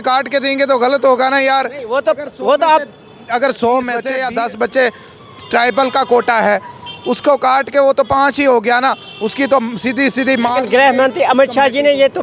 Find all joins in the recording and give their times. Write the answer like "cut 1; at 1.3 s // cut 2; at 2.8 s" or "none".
cut 1; at 4.1 s